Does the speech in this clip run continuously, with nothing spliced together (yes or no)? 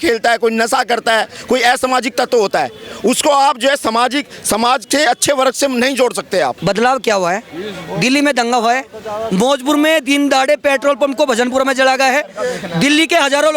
no